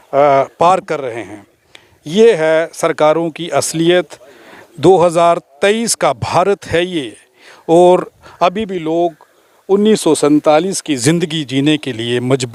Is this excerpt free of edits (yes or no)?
yes